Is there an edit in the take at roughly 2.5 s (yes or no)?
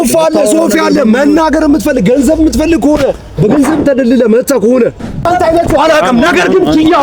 no